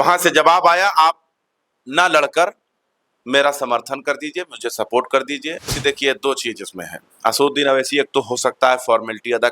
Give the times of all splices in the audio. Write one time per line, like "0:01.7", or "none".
0:05.7